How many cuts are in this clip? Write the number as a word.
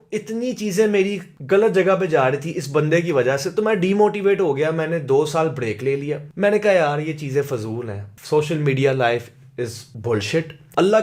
zero